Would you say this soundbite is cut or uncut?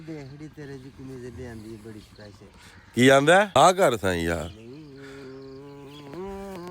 cut